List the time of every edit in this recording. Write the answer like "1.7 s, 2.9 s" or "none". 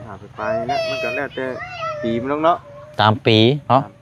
none

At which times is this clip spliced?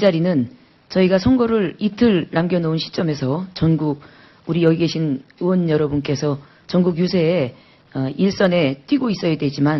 none

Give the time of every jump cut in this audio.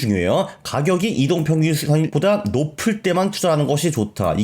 2.1 s

